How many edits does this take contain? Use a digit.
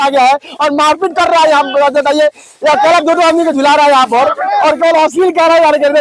0